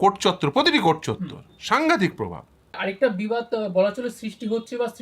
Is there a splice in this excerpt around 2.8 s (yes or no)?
yes